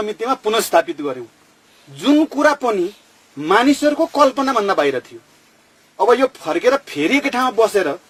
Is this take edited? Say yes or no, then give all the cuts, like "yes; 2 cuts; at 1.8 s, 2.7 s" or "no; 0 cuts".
no; 0 cuts